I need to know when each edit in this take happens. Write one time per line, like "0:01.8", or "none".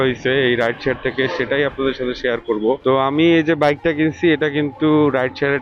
0:02.8